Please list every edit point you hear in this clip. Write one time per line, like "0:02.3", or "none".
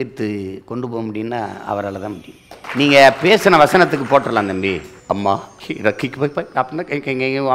0:02.6
0:04.9
0:05.6